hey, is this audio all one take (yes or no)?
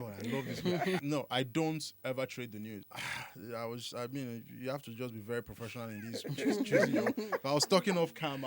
no